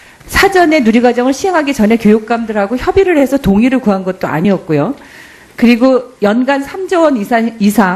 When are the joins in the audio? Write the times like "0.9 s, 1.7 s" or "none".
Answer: none